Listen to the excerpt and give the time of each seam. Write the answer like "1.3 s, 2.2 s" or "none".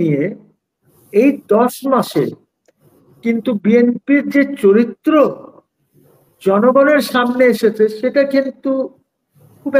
none